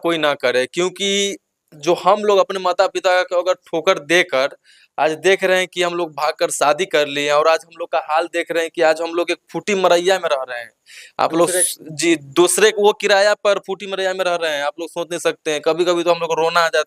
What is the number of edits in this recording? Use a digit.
0